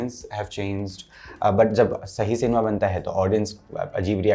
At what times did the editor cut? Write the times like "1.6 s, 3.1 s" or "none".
none